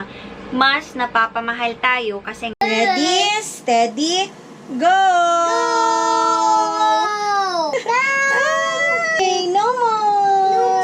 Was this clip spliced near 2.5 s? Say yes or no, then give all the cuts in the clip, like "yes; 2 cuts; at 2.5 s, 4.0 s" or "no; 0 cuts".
yes; 1 cut; at 2.5 s